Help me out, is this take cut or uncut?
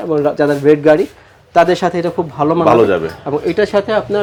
uncut